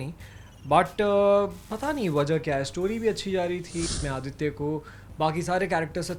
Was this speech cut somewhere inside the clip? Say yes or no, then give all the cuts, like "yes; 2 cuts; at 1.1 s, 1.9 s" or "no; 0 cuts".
yes; 1 cut; at 3.9 s